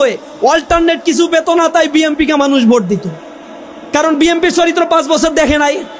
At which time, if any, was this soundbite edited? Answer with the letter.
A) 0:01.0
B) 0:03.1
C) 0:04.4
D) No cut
D